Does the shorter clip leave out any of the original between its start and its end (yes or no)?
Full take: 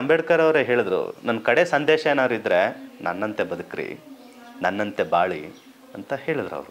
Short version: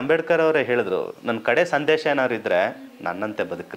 no